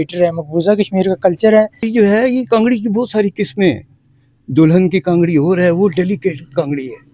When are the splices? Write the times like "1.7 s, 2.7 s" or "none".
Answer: 1.8 s